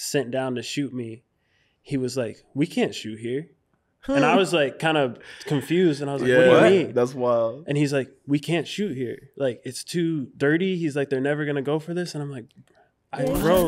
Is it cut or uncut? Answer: uncut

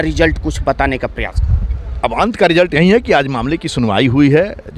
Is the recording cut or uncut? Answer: uncut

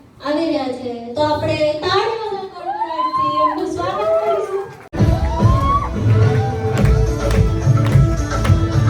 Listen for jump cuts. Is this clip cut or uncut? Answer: cut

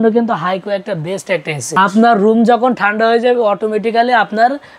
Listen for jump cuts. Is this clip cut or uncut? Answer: cut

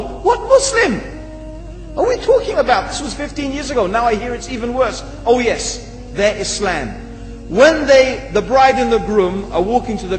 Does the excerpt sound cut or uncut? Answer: cut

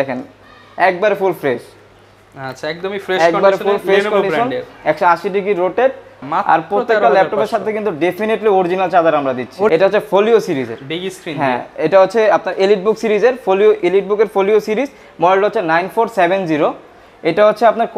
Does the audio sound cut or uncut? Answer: cut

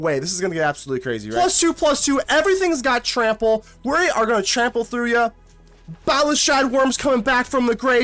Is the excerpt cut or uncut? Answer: cut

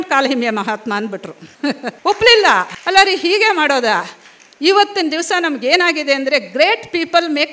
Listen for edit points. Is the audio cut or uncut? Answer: uncut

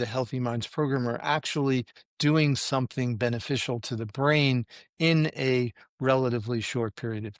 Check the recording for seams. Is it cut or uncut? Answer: uncut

